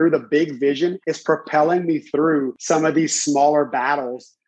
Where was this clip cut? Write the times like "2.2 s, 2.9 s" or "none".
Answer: 1.1 s, 2.6 s